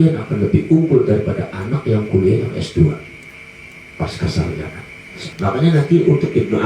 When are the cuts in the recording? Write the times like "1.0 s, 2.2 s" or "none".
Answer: 5.2 s